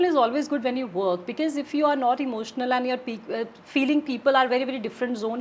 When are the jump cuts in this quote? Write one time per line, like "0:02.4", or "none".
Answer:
none

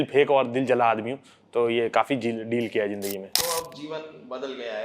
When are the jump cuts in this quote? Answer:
0:03.2

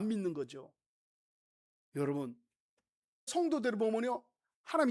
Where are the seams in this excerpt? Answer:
0:03.3

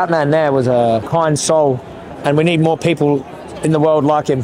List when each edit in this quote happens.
0:01.1
0:02.0

